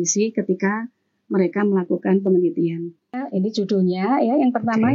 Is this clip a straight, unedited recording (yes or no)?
no